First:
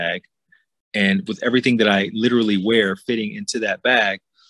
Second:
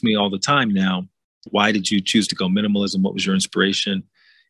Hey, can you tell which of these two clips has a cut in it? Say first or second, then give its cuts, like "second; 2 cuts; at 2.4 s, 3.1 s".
second; 1 cut; at 1.5 s